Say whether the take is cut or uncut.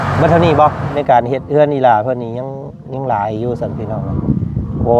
cut